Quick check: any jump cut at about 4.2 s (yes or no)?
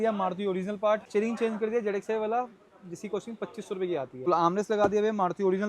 yes